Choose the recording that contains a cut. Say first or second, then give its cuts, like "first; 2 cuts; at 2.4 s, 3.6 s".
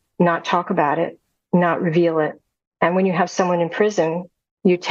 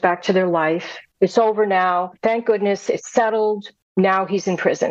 second; 3 cuts; at 1.1 s, 2.1 s, 3.7 s